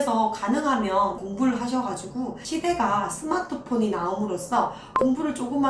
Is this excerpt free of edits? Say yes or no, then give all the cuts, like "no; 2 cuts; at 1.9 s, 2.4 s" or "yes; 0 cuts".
no; 2 cuts; at 1.2 s, 2.4 s